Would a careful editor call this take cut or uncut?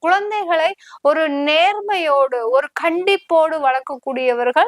uncut